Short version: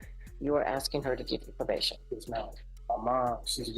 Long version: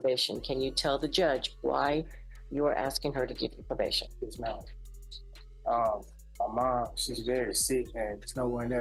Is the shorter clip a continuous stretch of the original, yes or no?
no